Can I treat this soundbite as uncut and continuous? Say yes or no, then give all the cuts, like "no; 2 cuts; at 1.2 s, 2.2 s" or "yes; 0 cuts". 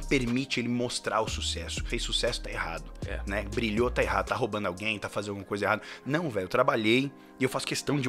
no; 1 cut; at 1.8 s